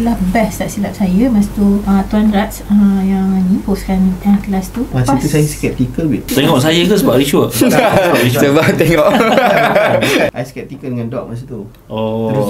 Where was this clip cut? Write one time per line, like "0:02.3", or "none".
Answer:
0:01.8
0:03.6
0:05.0
0:06.3
0:10.3